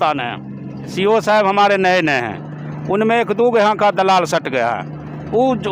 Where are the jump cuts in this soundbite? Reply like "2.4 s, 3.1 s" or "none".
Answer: 0.9 s